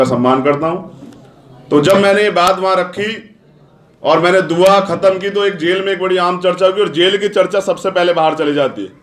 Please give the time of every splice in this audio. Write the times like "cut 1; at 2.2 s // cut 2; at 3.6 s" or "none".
none